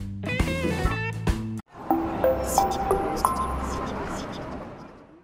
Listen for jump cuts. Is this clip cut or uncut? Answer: uncut